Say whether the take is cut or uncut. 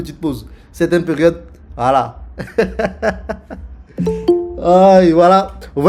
uncut